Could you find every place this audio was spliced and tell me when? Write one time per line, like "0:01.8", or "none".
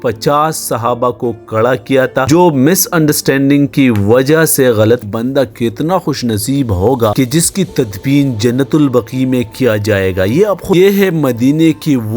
0:05.1
0:10.7